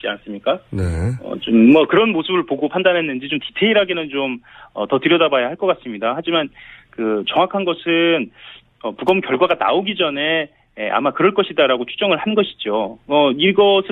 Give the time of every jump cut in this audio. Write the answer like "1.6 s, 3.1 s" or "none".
5.1 s